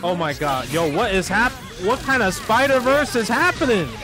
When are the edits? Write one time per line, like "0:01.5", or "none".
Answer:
0:01.7